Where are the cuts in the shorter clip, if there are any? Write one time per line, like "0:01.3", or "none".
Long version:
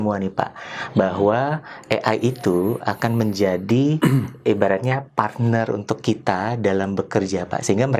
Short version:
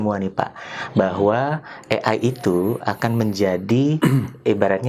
none